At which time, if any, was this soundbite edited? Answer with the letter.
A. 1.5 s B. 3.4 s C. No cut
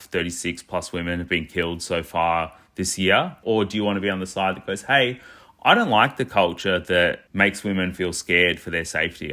B